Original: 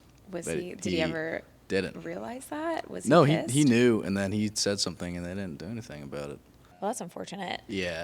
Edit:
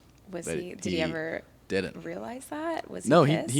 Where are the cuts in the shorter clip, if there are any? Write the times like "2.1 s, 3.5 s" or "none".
none